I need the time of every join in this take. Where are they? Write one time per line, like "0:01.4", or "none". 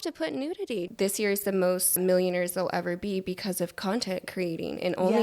0:00.9
0:02.0